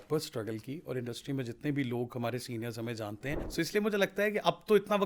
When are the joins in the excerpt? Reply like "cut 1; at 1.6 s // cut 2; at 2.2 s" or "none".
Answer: cut 1; at 3.4 s